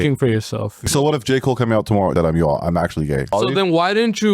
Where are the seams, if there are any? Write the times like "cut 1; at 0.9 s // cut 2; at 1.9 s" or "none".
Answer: cut 1; at 0.9 s // cut 2; at 2.1 s // cut 3; at 3.3 s